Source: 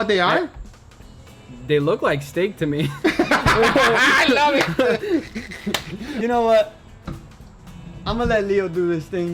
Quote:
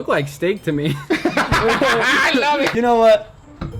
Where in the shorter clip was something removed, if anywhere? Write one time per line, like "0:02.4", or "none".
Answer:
0:02.7